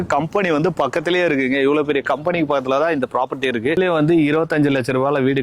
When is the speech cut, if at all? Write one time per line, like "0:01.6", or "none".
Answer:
0:03.8

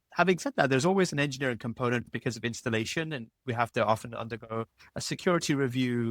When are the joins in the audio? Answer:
0:02.1

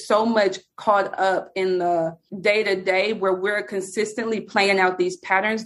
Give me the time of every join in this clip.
0:02.2

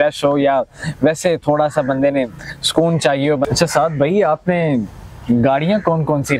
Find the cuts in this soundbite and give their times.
0:03.5

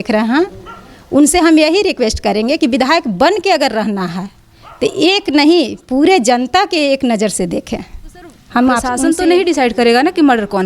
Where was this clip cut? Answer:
0:08.9

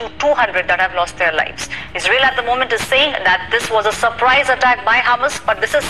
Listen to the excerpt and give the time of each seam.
none

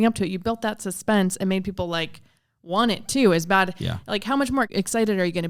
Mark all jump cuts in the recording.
none

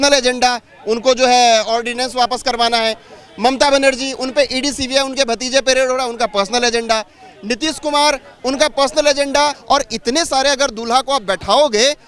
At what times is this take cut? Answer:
0:09.6

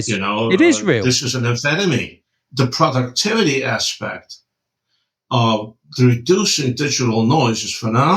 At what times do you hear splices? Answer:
0:02.1

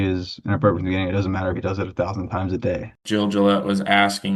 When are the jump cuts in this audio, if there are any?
0:03.0

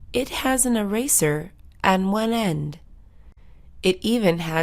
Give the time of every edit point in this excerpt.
0:03.4

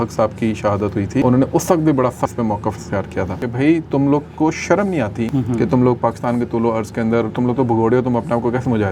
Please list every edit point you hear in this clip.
0:01.2
0:02.3
0:03.4
0:05.3

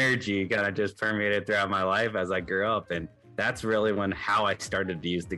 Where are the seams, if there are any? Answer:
none

